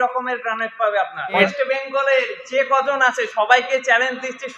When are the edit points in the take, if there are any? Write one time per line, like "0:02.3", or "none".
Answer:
0:01.4